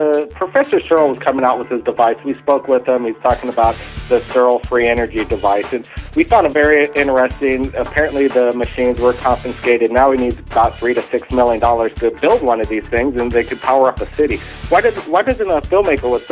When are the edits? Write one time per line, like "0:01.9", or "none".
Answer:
0:11.9